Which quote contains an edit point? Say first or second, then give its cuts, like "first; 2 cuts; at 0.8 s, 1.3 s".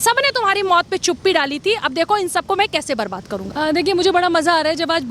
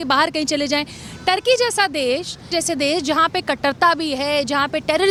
first; 1 cut; at 3.4 s